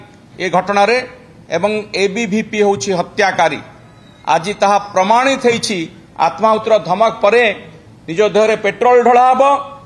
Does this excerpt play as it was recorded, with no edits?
no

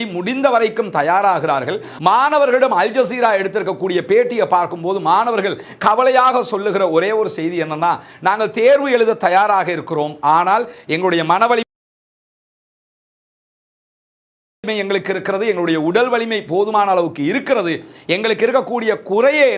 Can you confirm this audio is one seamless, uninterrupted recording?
yes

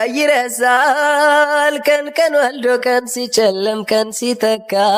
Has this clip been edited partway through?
no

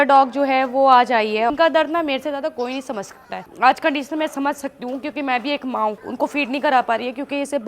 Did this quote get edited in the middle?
yes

